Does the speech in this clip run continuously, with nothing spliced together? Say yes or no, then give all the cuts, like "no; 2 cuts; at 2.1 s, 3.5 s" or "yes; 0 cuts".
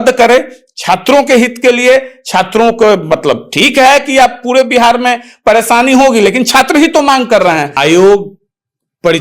no; 1 cut; at 7.7 s